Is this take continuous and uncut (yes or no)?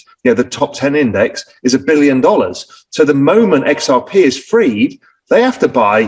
yes